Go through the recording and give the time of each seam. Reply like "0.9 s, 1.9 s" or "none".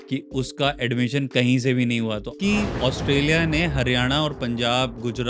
2.3 s

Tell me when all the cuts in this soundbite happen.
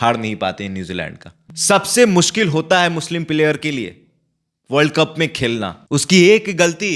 1.5 s, 5.8 s

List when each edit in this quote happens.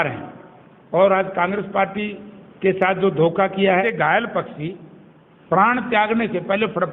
3.9 s

